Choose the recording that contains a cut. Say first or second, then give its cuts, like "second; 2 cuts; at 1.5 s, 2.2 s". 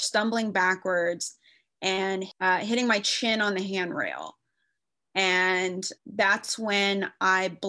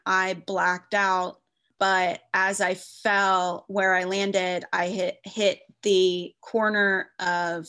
second; 1 cut; at 1.6 s